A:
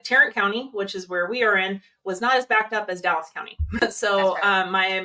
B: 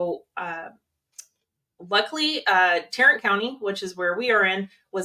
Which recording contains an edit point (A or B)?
A